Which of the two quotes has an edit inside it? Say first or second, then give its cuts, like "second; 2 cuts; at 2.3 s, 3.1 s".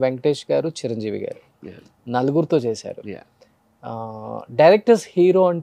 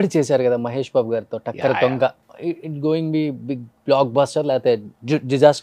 second; 1 cut; at 2.3 s